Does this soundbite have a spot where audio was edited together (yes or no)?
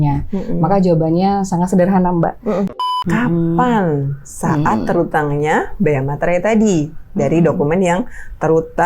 yes